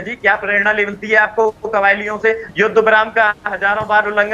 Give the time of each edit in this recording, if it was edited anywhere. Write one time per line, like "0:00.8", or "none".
0:02.4